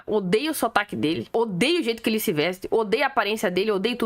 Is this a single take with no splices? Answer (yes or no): no